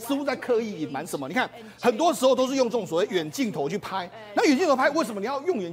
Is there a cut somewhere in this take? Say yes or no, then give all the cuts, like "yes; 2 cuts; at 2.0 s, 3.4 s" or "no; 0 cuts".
no; 0 cuts